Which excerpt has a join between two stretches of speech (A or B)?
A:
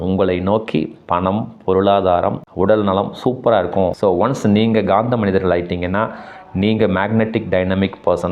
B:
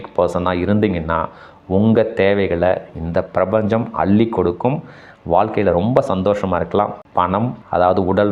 A